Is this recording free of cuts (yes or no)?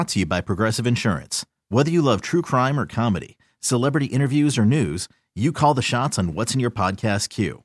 yes